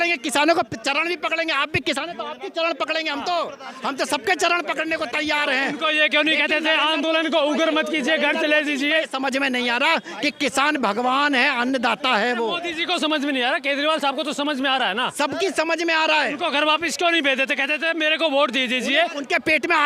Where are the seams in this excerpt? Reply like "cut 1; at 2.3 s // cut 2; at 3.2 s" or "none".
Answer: none

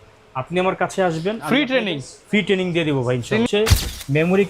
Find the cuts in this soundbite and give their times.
cut 1; at 3.5 s

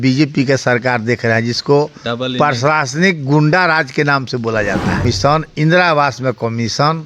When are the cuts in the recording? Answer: cut 1; at 5.0 s

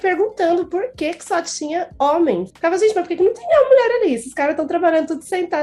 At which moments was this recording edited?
cut 1; at 2.5 s

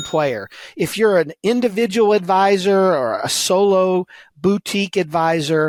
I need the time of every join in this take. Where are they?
none

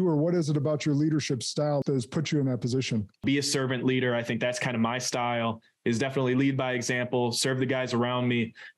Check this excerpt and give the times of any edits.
cut 1; at 1.8 s // cut 2; at 3.2 s

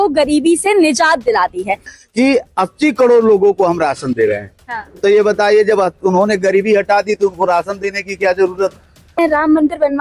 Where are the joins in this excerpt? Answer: cut 1; at 1.9 s // cut 2; at 9.1 s

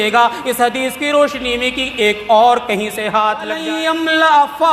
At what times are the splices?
cut 1; at 3.6 s

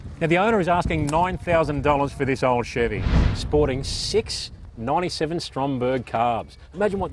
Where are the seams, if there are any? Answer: cut 1; at 3.2 s

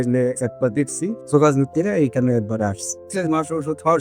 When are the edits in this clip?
cut 1; at 1.2 s // cut 2; at 3.0 s

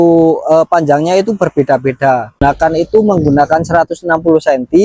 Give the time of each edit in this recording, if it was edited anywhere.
cut 1; at 2.4 s

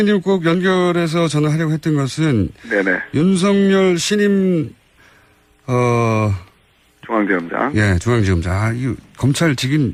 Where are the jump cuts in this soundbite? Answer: none

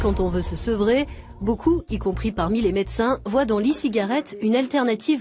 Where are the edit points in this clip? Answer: cut 1; at 3.1 s

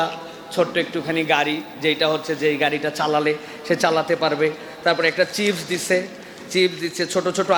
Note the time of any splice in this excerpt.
none

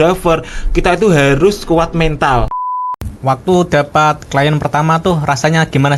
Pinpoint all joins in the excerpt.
cut 1; at 2.6 s

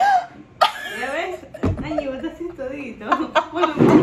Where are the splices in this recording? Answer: none

